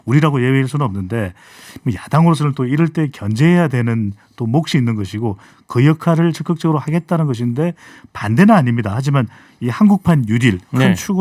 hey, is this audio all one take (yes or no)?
yes